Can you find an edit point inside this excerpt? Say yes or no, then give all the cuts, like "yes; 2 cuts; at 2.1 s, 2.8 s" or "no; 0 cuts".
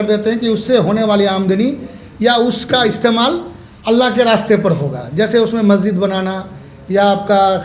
no; 0 cuts